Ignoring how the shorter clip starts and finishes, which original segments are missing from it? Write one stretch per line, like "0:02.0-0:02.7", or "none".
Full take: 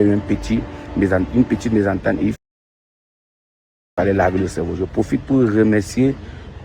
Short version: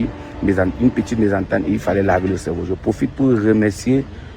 0:02.4-0:03.9